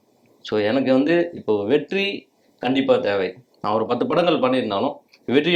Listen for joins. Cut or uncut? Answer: uncut